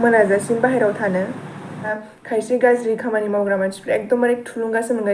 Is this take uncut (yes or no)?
no